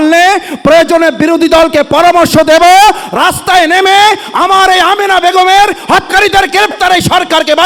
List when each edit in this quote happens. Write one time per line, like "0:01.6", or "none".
none